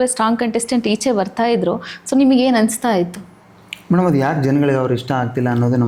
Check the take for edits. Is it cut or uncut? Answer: uncut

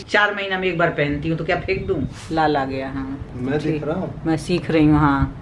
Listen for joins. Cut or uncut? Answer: cut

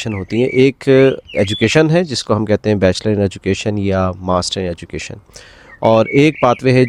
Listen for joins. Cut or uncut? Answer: uncut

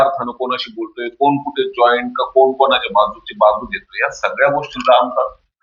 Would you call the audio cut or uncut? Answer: uncut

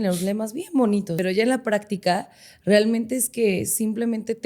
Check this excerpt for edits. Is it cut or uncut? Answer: cut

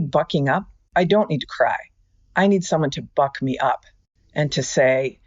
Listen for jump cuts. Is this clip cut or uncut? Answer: uncut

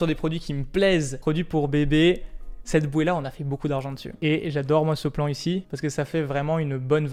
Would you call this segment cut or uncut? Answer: uncut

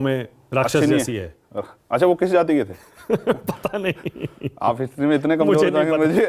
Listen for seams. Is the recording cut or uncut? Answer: uncut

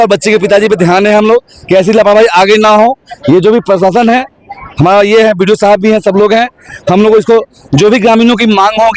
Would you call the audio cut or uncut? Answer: uncut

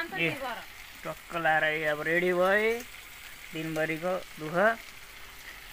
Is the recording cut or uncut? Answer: uncut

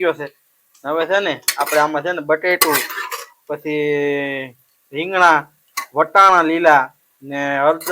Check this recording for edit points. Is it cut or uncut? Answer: uncut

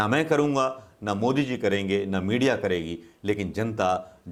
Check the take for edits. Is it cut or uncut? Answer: uncut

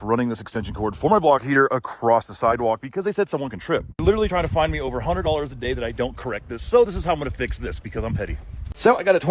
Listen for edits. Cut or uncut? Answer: uncut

